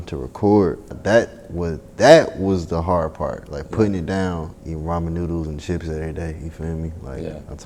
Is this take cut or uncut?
cut